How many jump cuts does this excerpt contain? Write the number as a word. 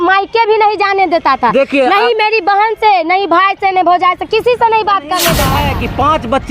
one